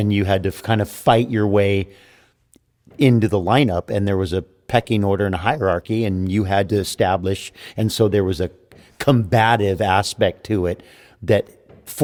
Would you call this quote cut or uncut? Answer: uncut